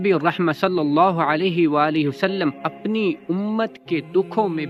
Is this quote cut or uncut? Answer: uncut